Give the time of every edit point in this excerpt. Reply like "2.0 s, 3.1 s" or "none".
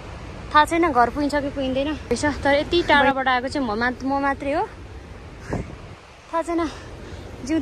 2.1 s